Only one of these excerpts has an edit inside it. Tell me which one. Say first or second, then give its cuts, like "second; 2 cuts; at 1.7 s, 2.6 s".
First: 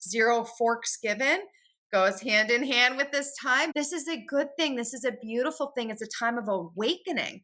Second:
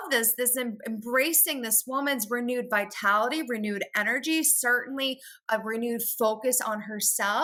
first; 1 cut; at 3.7 s